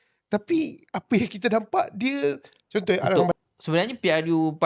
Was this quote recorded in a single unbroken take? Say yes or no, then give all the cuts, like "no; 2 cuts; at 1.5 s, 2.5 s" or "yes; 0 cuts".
no; 1 cut; at 3.3 s